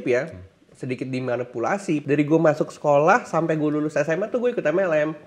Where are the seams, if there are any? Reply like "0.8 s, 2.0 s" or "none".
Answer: 2.0 s